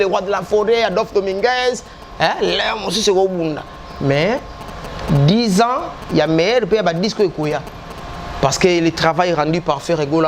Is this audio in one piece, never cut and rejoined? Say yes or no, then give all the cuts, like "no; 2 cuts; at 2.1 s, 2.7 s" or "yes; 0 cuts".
yes; 0 cuts